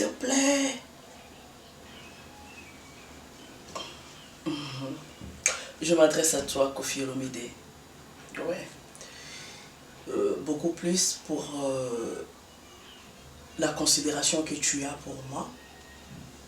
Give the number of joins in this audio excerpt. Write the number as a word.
one